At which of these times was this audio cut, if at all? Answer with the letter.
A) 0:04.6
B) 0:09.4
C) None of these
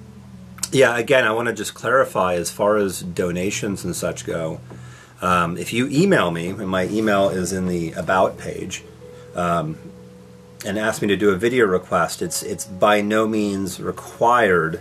A